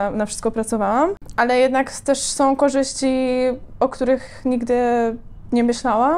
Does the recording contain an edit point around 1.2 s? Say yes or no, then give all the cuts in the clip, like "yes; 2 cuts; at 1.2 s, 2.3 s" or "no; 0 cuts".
no; 0 cuts